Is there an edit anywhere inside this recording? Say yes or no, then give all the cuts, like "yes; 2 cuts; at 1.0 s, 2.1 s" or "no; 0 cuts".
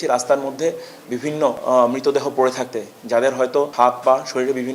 no; 0 cuts